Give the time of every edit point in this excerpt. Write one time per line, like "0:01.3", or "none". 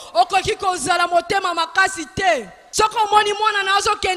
0:02.6